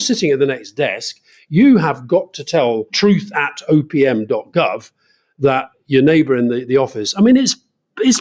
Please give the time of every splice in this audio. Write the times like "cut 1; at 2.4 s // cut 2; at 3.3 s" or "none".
none